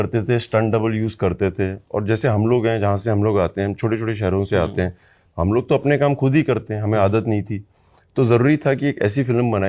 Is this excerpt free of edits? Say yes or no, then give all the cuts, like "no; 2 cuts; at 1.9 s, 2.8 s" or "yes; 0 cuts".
yes; 0 cuts